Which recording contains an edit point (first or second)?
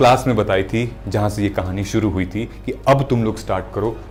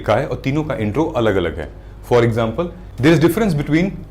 second